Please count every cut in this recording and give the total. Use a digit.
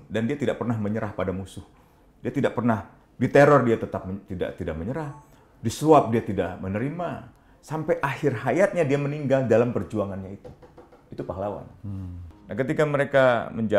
1